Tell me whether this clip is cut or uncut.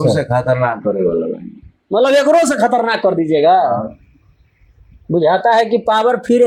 uncut